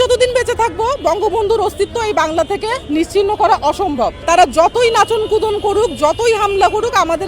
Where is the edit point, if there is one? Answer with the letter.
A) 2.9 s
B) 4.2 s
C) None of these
B